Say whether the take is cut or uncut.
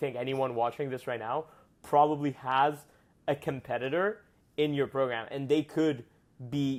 uncut